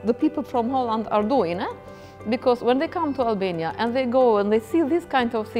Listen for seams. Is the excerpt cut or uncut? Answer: uncut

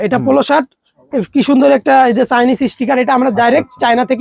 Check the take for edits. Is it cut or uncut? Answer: uncut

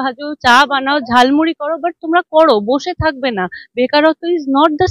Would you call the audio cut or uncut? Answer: uncut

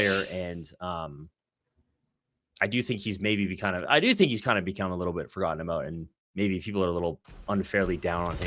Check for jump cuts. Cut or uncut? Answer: uncut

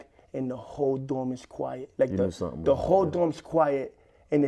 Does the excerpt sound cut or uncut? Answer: cut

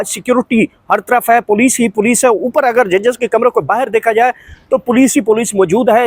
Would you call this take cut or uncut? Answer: uncut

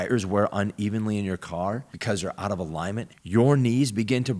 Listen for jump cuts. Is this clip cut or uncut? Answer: uncut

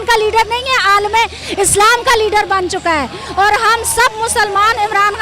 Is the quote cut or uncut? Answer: uncut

